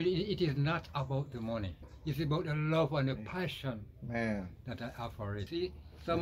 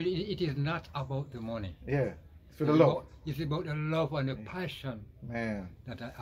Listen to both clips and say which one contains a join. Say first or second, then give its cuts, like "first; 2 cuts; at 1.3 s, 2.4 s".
first; 2 cuts; at 1.8 s, 5.5 s